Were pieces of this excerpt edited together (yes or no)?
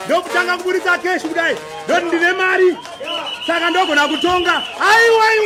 no